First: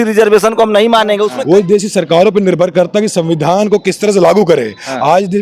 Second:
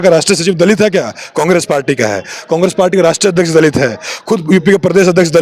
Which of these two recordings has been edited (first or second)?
first